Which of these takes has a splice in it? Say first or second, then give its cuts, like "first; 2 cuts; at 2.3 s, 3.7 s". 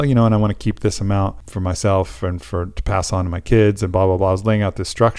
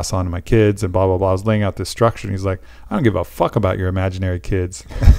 first; 1 cut; at 1.5 s